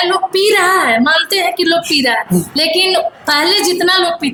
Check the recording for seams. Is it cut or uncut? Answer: uncut